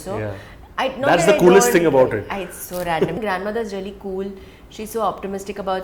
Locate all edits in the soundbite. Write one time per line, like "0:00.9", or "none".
0:03.2